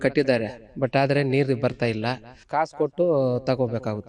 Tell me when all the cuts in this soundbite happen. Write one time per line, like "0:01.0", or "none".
0:02.5